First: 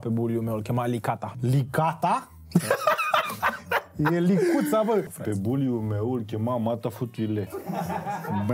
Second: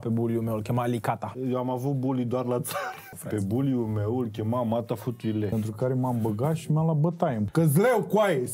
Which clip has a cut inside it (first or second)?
second